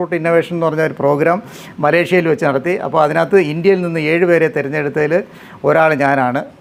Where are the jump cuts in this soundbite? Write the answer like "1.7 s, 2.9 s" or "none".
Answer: none